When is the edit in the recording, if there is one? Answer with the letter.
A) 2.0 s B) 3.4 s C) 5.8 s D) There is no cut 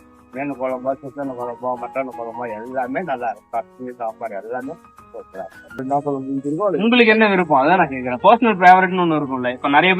C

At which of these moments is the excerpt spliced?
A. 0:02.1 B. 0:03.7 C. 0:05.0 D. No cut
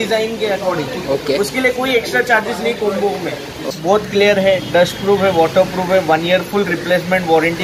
B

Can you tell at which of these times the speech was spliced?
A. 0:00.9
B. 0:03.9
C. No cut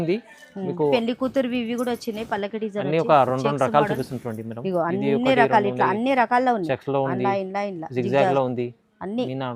A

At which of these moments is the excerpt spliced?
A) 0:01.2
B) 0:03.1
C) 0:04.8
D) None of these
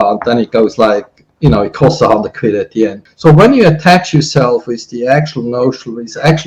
B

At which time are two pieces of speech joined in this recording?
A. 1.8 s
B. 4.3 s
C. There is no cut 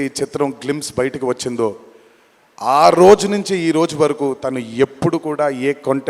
C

